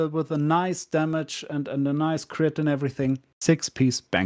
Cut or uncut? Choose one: cut